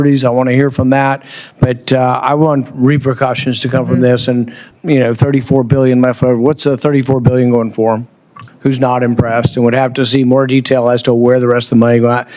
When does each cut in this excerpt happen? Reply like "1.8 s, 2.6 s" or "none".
4.6 s, 8.4 s